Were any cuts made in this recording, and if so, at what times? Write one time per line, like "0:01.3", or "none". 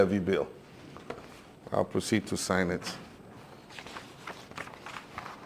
0:03.2

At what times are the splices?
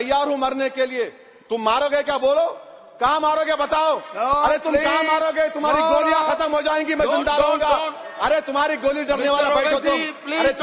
none

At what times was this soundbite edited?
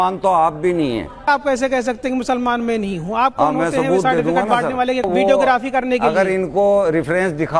0:01.3
0:05.1

